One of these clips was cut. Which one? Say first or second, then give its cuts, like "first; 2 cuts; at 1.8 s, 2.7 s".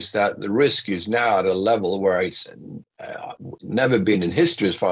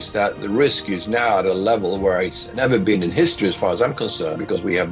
second; 1 cut; at 2.4 s